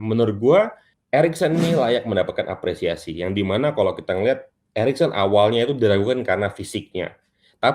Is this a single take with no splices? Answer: yes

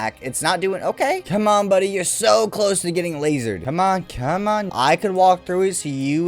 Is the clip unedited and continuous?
no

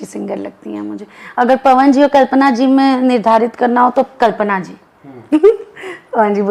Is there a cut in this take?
no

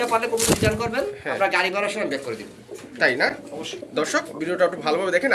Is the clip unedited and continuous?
yes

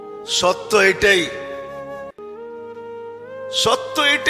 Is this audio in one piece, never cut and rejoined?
no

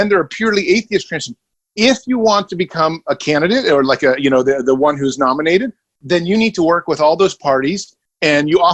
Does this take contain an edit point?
yes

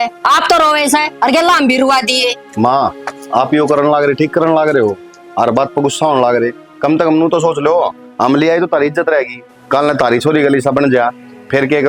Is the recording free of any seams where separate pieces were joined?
yes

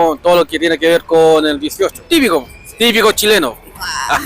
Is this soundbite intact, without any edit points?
no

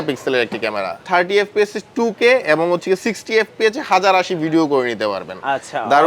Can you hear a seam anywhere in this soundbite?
yes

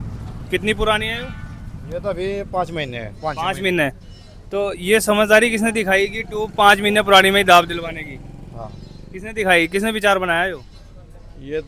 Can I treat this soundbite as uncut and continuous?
yes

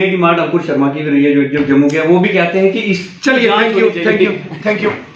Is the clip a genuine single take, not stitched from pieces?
yes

